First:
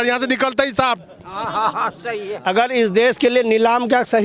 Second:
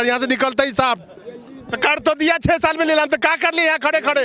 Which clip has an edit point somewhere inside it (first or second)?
second